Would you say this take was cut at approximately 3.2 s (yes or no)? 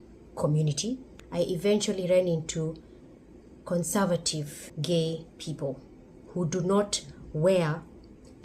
no